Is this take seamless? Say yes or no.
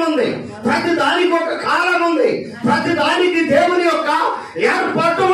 yes